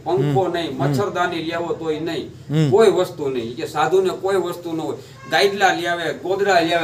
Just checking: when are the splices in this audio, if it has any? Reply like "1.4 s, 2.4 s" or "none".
none